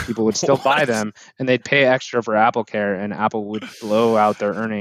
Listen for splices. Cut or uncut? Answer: uncut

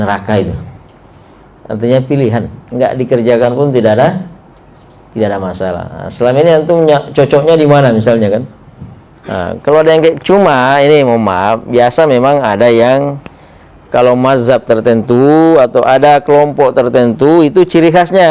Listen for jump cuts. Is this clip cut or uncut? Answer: uncut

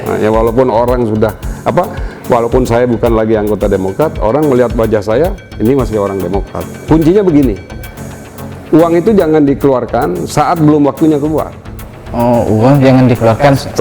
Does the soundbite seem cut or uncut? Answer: cut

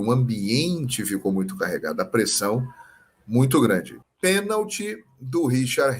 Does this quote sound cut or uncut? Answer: cut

